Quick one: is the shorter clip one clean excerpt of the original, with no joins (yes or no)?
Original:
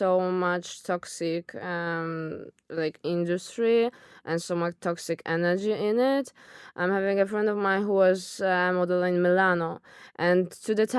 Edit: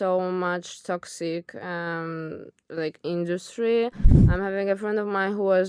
no